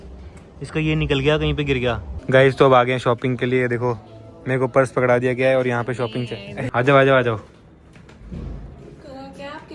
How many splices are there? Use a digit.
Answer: 2